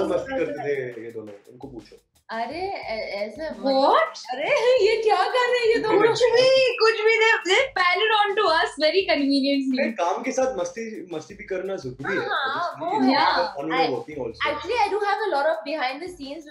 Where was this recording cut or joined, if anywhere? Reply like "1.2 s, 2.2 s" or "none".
none